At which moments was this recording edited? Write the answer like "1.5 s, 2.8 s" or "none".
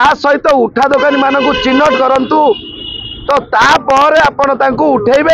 none